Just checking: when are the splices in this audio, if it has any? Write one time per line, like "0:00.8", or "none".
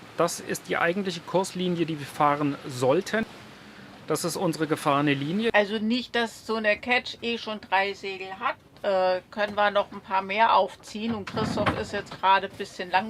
0:03.2
0:05.5